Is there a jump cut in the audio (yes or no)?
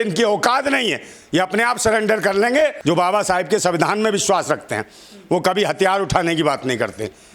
yes